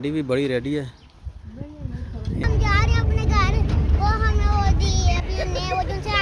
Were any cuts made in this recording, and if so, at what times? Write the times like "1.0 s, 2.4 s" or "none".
2.4 s